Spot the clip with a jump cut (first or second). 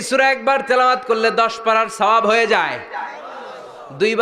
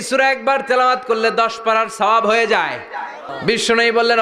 second